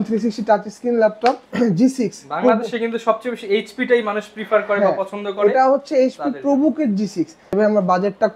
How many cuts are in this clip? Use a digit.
2